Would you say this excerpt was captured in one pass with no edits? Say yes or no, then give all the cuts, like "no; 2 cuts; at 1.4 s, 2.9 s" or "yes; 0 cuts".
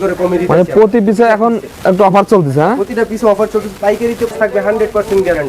no; 1 cut; at 4.3 s